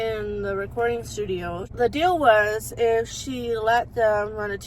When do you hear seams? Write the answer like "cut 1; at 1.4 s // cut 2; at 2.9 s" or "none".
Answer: cut 1; at 1.7 s